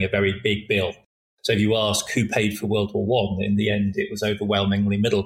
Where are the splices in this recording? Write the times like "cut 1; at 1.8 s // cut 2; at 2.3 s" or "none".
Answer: none